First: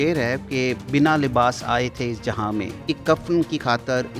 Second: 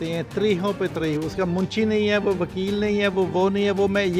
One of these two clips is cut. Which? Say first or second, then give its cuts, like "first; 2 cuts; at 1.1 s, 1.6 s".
first; 2 cuts; at 0.8 s, 2.8 s